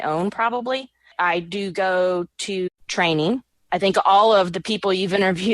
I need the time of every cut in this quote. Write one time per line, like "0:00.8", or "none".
0:01.1
0:02.7
0:03.5